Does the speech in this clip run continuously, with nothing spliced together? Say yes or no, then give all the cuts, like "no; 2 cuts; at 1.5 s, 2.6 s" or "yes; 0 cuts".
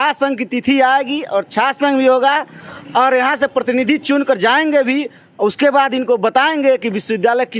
yes; 0 cuts